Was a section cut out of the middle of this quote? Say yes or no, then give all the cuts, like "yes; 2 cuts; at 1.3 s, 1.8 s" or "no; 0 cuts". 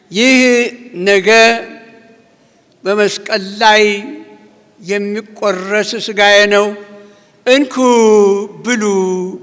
no; 0 cuts